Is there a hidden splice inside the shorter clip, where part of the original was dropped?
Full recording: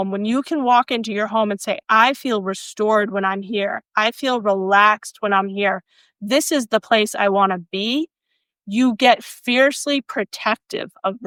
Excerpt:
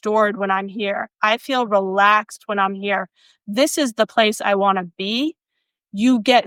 no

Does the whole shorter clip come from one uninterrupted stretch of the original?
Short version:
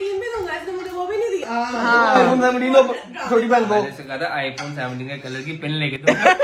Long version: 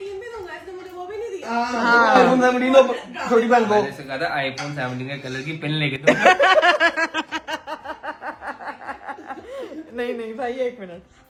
yes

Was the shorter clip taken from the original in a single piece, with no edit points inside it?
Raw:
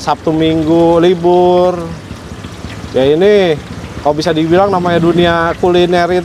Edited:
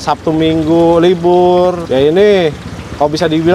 no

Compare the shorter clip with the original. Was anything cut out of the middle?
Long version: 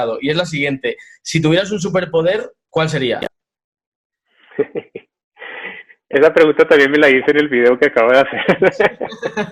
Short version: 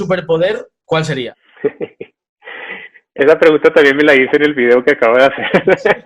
yes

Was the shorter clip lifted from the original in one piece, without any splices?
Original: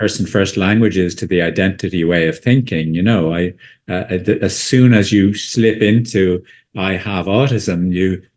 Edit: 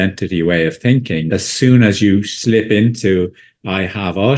no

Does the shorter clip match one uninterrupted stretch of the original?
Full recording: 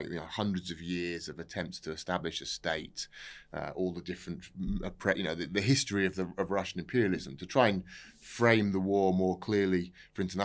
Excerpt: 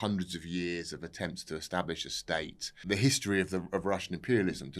no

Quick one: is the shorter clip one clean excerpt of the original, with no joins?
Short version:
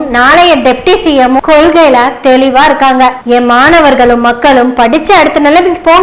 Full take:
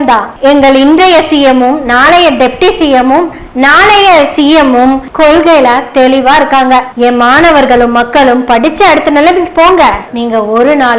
no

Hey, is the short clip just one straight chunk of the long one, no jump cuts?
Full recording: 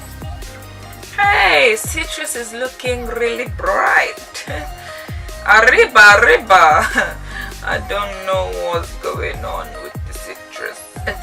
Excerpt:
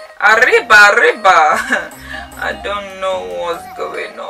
yes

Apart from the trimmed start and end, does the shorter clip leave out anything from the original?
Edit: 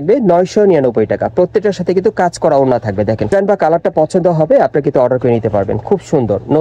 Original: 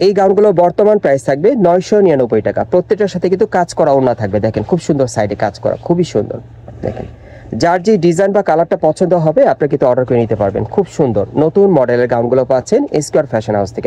yes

